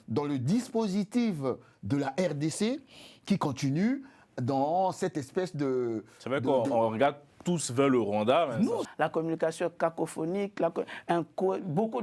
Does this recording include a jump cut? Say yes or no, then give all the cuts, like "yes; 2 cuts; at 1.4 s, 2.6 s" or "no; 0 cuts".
yes; 1 cut; at 8.8 s